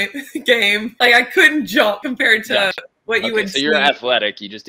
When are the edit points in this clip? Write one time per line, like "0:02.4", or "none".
0:00.9
0:02.0